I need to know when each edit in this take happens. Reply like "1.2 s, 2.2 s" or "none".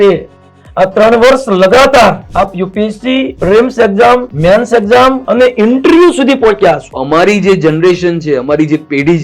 2.2 s, 3.3 s, 4.3 s, 5.2 s, 7.0 s